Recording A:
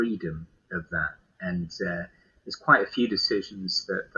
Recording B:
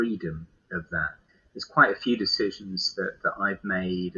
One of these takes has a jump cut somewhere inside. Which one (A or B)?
B